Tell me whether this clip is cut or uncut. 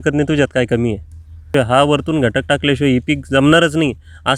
cut